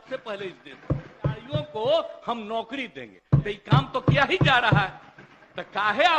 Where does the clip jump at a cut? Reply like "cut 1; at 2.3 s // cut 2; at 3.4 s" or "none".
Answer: cut 1; at 1.5 s

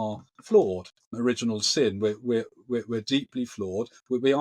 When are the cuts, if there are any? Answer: cut 1; at 1.1 s

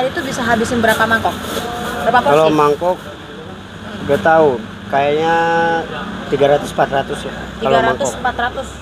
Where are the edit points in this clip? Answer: none

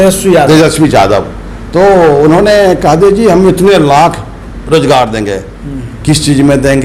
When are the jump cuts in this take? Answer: none

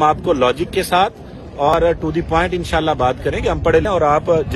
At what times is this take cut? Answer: cut 1; at 1.7 s // cut 2; at 3.8 s

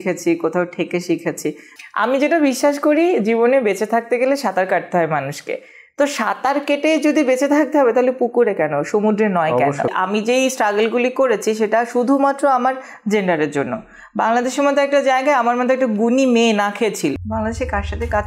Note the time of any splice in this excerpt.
cut 1; at 1.7 s // cut 2; at 9.9 s // cut 3; at 17.1 s

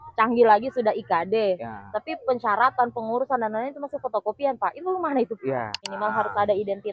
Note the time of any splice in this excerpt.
cut 1; at 5.8 s

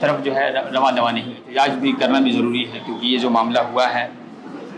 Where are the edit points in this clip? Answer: cut 1; at 1.4 s

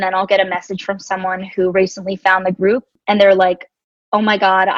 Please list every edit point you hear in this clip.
cut 1; at 2.9 s

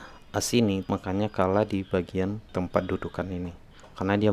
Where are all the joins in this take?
cut 1; at 0.9 s // cut 2; at 2.4 s

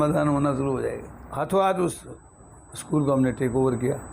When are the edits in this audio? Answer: cut 1; at 1.0 s

